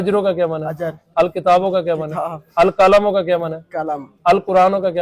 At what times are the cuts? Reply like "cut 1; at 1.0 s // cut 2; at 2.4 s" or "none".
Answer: none